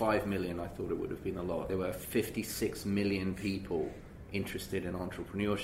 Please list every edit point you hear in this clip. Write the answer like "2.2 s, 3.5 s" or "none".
1.7 s